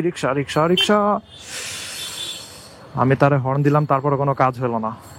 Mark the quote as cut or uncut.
uncut